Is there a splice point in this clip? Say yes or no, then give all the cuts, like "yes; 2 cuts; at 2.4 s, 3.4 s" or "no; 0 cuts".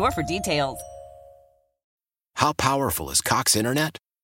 yes; 1 cut; at 1.9 s